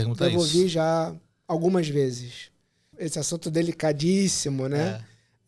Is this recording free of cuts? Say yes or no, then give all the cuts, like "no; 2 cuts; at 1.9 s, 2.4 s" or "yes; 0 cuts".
no; 1 cut; at 3.0 s